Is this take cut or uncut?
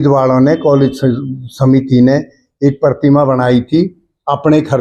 uncut